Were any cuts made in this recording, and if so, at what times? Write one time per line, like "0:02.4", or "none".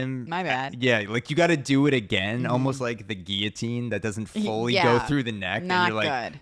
none

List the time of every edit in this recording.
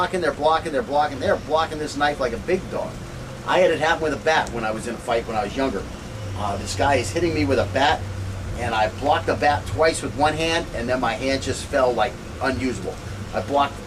0:11.6

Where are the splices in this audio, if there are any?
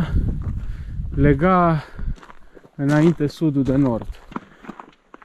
0:04.3

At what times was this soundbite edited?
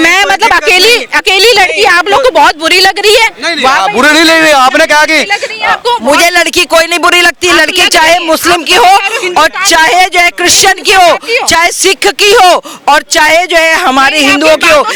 none

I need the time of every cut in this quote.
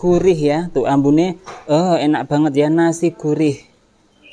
none

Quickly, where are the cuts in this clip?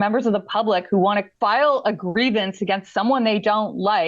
0:01.3

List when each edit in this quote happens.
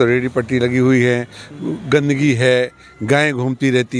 none

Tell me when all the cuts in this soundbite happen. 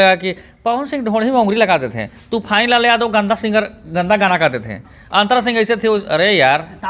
none

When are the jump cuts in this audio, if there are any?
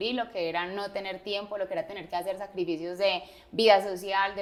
none

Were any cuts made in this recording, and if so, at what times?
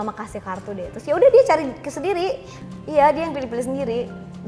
0:02.5

